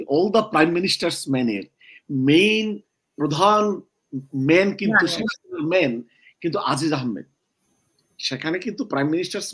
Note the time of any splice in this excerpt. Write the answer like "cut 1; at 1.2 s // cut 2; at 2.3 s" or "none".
none

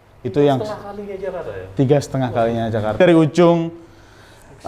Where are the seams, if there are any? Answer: cut 1; at 3.0 s

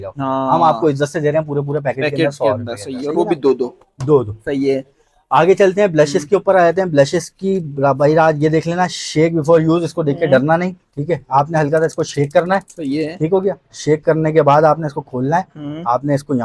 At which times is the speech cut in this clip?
none

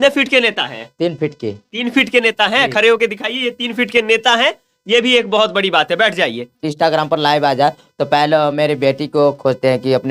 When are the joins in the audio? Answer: cut 1; at 6.7 s

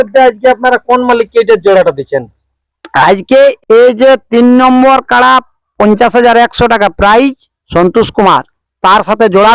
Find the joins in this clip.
cut 1; at 3.6 s

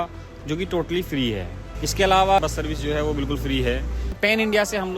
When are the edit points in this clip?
cut 1; at 1.6 s // cut 2; at 2.4 s // cut 3; at 4.2 s

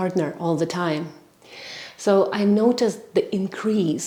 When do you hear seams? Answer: none

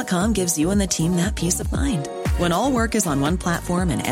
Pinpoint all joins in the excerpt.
none

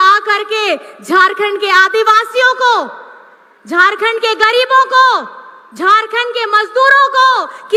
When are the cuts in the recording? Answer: none

